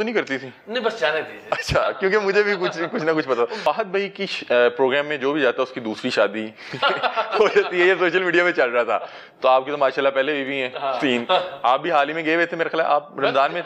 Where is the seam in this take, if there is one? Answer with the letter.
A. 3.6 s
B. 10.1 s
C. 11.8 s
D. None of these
A